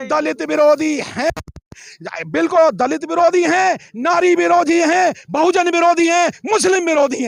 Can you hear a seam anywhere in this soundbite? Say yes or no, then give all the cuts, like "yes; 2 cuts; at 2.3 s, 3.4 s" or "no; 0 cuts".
no; 0 cuts